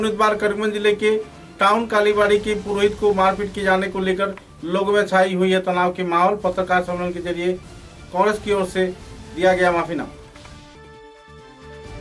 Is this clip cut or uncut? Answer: uncut